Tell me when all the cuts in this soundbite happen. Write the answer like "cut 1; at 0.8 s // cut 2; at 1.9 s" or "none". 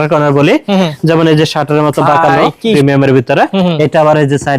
cut 1; at 2.7 s